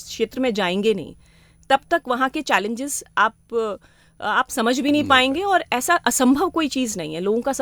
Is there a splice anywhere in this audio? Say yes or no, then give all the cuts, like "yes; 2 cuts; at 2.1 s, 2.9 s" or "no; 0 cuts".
no; 0 cuts